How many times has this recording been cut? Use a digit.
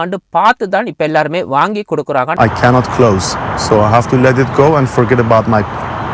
1